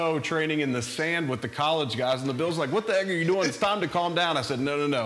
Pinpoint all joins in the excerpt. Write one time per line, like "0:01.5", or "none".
none